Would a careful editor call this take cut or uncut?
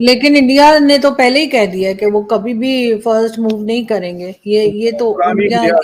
uncut